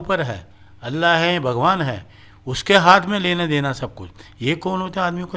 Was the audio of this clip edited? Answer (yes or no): no